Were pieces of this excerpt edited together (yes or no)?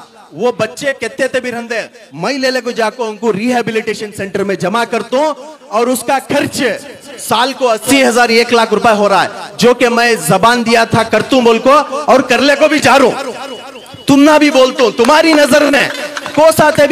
no